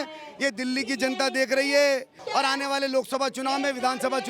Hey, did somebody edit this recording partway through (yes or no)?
yes